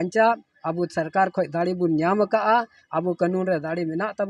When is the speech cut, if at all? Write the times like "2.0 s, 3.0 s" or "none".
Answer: none